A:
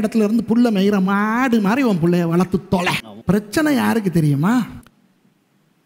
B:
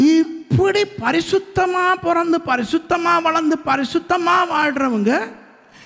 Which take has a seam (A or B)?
A